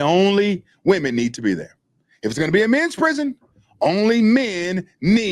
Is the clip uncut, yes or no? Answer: yes